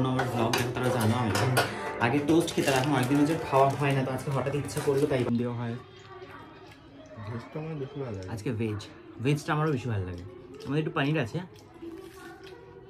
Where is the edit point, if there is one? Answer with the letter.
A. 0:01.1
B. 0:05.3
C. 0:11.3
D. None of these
B